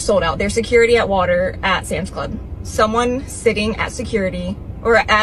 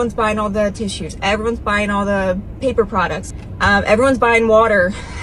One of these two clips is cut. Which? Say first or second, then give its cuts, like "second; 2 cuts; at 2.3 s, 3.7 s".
second; 1 cut; at 3.3 s